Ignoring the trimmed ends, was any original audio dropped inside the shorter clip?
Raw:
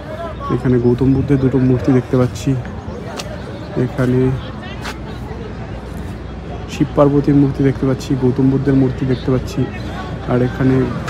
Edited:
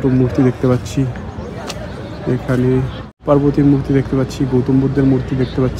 yes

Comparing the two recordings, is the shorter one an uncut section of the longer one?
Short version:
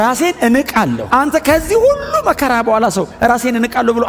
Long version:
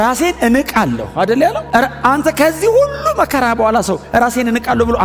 no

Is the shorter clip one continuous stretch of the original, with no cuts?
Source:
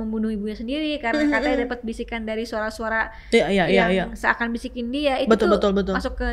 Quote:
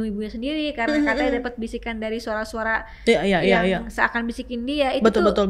yes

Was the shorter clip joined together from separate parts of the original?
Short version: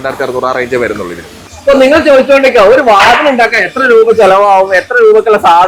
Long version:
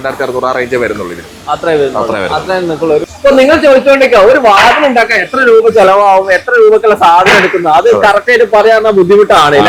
yes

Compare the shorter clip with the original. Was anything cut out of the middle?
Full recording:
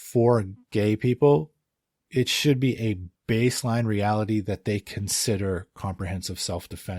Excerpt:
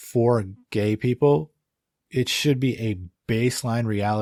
no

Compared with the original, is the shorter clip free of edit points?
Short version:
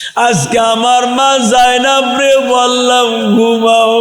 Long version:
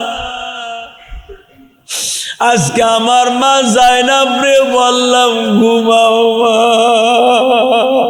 yes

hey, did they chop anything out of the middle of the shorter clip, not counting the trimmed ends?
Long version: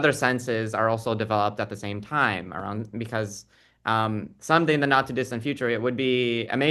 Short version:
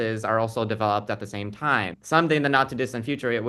yes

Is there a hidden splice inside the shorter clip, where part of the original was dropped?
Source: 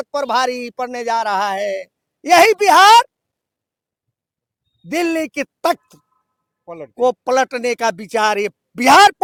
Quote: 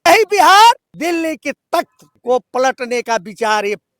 yes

